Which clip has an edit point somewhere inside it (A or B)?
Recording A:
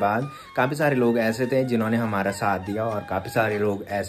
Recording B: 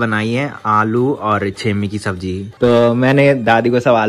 B